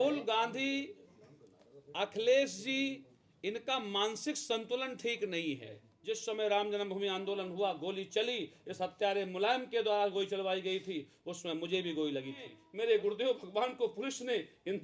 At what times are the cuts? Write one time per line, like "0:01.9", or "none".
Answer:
0:05.9
0:12.6